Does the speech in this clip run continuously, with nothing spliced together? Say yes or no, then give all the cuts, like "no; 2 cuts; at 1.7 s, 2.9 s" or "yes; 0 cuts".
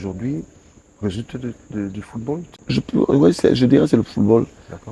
no; 1 cut; at 2.5 s